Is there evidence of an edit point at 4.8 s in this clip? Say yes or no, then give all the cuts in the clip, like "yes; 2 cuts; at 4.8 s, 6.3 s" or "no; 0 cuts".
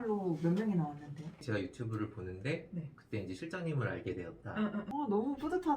yes; 2 cuts; at 1.4 s, 4.8 s